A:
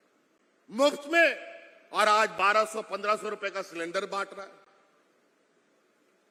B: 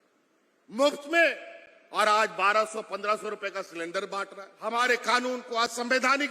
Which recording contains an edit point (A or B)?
B